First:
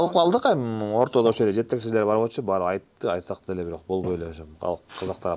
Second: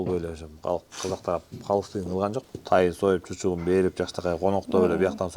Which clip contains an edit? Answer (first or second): second